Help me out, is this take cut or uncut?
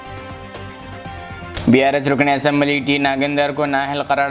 cut